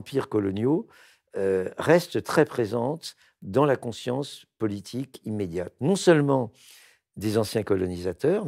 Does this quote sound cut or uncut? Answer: uncut